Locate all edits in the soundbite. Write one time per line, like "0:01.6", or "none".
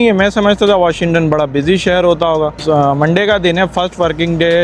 0:02.6